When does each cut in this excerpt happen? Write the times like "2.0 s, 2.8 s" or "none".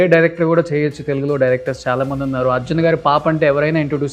none